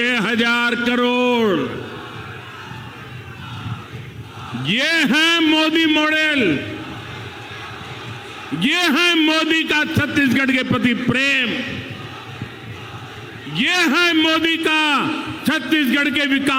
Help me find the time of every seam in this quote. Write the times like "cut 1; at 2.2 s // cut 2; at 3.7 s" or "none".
none